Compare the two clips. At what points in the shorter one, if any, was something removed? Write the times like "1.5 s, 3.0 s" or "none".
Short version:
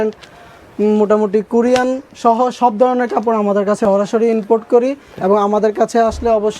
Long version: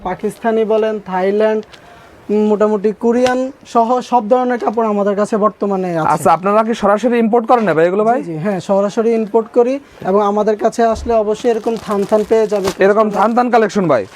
3.8 s